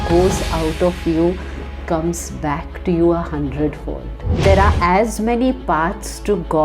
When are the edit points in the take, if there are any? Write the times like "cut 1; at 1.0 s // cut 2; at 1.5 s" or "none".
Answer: cut 1; at 4.4 s